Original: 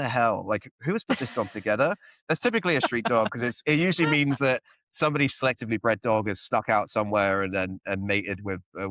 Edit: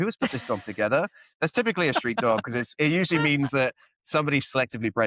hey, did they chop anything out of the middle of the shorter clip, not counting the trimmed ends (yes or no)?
no